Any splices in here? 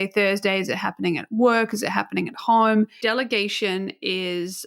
yes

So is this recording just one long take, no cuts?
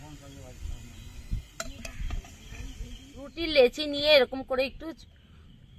yes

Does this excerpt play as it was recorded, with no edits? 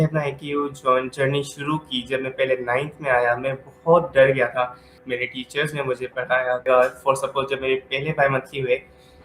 no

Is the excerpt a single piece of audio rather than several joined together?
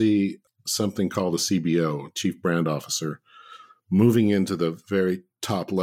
yes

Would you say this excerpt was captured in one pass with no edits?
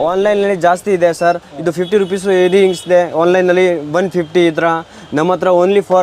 yes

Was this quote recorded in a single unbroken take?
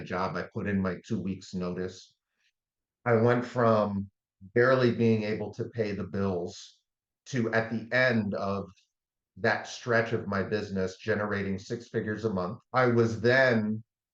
no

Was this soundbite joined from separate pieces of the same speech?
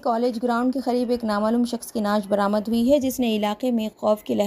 no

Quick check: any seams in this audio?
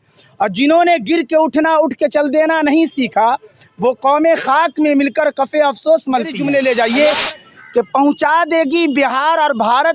yes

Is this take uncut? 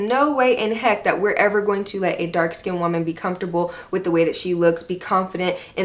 yes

